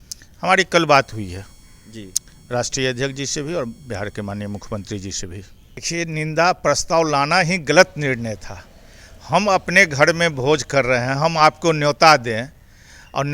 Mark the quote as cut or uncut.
cut